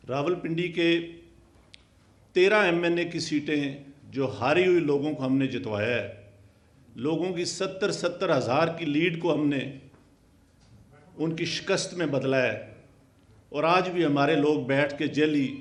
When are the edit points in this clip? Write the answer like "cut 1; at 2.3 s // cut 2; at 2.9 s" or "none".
none

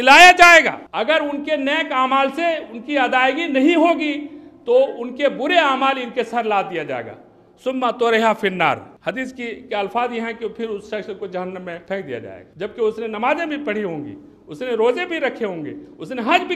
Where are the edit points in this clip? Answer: cut 1; at 0.8 s // cut 2; at 8.9 s // cut 3; at 12.0 s

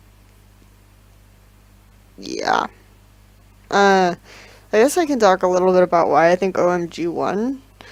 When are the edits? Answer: none

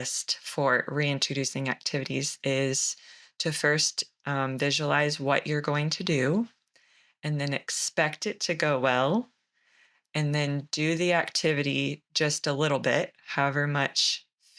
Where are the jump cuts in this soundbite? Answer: cut 1; at 2.3 s

